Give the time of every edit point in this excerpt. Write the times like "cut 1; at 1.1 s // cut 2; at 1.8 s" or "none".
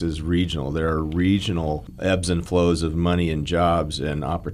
cut 1; at 1.9 s

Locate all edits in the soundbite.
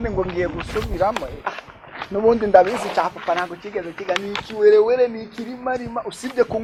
none

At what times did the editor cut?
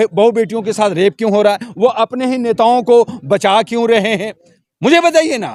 none

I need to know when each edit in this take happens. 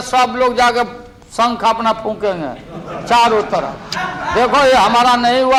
none

